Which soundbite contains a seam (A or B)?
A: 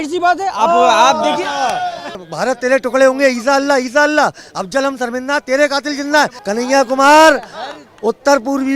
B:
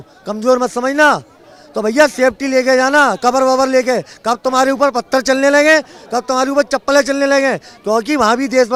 A